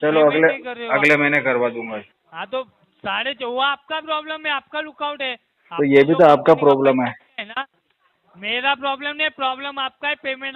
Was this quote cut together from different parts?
yes; 1 cut; at 2.2 s

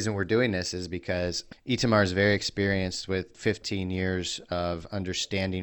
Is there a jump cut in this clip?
yes; 2 cuts; at 1.5 s, 3.3 s

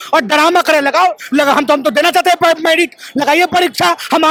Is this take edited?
no; 0 cuts

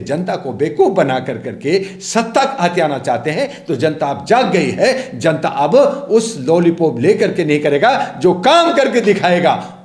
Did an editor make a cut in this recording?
no; 0 cuts

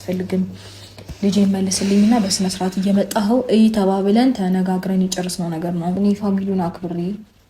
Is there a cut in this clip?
yes; 1 cut; at 6.0 s

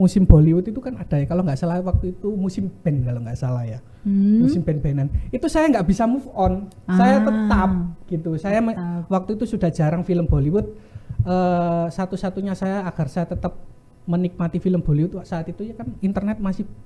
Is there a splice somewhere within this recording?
no; 0 cuts

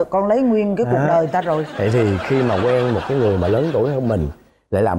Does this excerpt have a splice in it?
no; 0 cuts

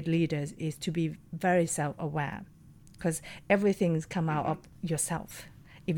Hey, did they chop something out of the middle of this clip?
yes; 1 cut; at 4.7 s

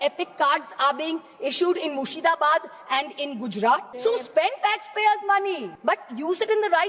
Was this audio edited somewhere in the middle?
yes; 2 cuts; at 3.9 s, 5.7 s

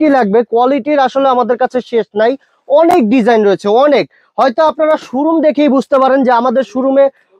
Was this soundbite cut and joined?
no; 0 cuts

